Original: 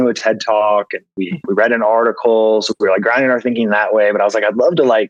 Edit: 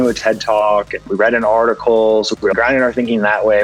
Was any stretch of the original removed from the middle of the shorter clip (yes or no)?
yes